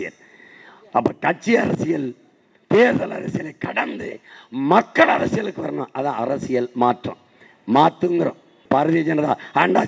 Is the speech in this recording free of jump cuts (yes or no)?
no